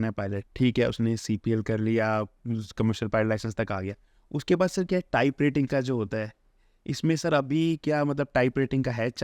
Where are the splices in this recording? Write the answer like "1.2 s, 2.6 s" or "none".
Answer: none